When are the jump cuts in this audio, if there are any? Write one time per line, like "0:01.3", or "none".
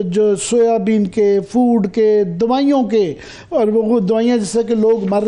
none